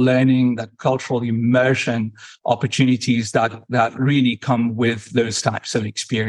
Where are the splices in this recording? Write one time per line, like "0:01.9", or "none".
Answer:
none